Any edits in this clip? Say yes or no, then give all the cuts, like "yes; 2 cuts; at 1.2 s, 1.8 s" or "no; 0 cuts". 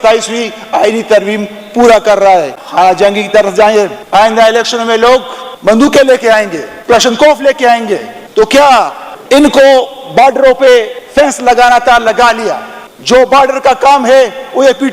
yes; 1 cut; at 2.6 s